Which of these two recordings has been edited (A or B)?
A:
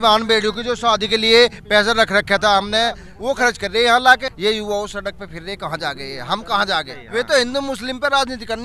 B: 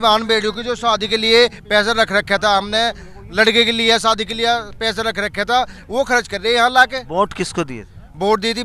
A